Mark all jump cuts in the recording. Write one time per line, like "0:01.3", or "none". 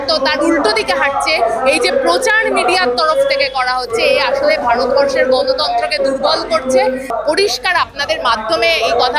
0:07.1